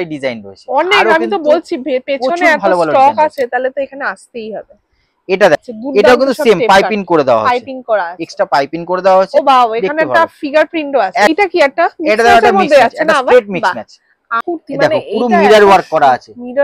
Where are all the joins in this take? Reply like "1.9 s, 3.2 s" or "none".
5.6 s, 11.3 s, 14.3 s